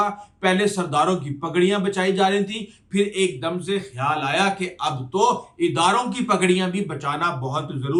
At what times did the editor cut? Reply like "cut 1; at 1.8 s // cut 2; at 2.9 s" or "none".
none